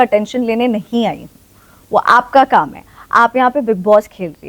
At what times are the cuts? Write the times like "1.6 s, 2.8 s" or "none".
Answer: none